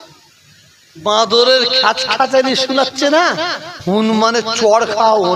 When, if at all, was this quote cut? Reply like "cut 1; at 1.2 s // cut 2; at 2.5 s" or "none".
none